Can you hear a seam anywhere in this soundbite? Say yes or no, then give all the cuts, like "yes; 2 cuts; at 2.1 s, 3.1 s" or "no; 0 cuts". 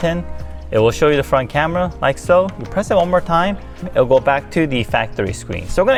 no; 0 cuts